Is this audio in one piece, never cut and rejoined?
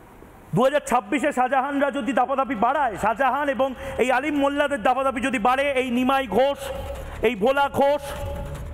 yes; 0 cuts

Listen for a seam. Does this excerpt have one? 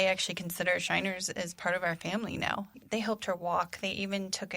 yes; 1 cut; at 2.8 s

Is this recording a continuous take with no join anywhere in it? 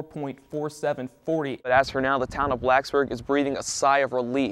no; 1 cut; at 1.7 s

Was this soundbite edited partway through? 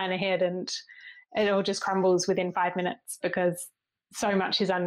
yes; 1 cut; at 3.8 s

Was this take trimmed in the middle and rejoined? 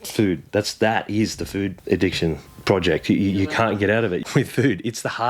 yes; 3 cuts; at 1.8 s, 2.5 s, 4.2 s

